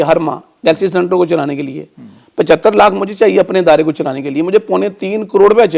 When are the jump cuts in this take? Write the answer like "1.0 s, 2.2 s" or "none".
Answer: none